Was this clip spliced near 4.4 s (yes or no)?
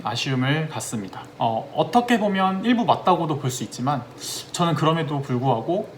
no